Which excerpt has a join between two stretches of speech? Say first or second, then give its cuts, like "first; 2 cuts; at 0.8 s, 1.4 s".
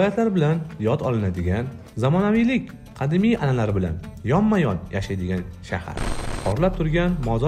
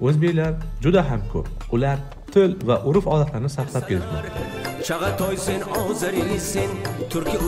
first; 1 cut; at 6.2 s